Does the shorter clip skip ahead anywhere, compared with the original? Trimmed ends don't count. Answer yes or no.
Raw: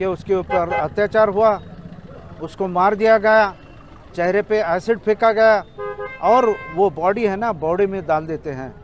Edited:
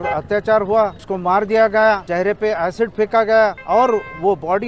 yes